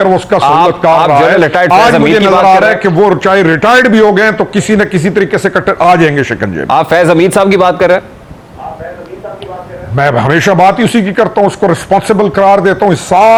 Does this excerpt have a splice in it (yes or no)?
no